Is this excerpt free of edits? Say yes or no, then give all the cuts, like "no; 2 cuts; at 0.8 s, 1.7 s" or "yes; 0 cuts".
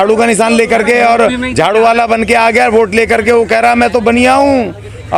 yes; 0 cuts